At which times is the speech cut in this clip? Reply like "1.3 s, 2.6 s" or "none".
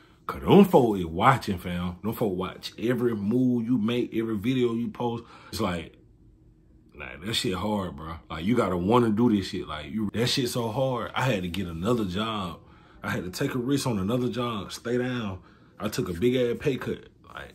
5.6 s, 10.1 s